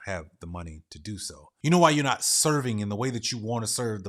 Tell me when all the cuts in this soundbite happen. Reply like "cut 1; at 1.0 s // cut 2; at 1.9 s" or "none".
cut 1; at 1.4 s